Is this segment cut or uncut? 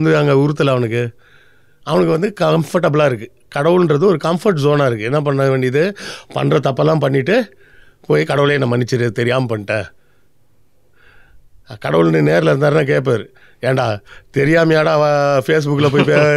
uncut